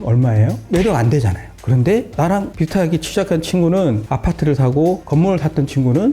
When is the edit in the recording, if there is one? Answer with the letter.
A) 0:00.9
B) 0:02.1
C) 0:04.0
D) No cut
C